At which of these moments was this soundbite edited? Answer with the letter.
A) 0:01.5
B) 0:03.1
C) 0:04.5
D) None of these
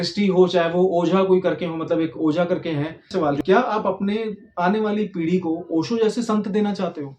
B